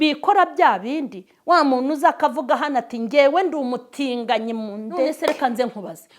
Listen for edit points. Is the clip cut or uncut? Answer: cut